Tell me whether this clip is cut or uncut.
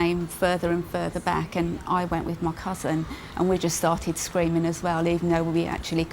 uncut